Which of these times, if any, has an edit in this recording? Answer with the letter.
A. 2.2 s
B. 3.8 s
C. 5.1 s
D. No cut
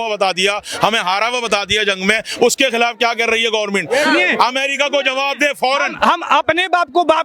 D